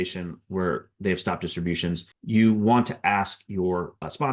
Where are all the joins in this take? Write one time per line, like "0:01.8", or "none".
none